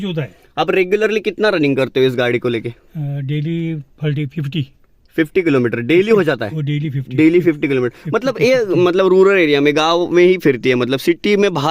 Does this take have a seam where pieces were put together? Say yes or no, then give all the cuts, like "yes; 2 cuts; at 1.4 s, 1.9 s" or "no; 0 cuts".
no; 0 cuts